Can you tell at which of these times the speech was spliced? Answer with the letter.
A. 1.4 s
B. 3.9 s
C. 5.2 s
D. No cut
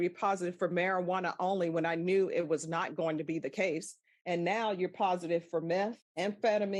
D